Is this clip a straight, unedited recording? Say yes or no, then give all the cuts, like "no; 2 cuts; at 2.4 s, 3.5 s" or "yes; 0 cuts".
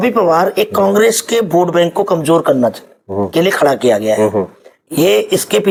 yes; 0 cuts